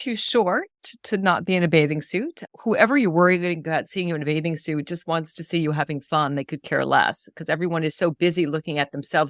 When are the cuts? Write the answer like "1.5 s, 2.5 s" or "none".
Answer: 2.5 s